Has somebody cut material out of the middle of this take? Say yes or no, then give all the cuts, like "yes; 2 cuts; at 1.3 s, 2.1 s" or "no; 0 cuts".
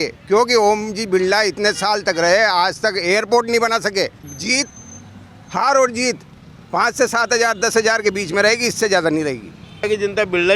yes; 2 cuts; at 4.3 s, 9.8 s